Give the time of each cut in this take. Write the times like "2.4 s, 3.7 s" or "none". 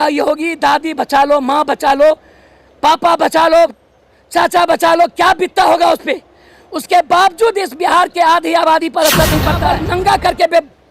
9.6 s